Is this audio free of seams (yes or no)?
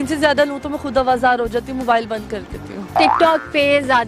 no